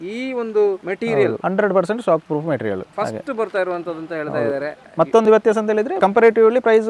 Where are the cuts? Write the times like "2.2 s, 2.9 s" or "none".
1.1 s, 2.9 s, 5.9 s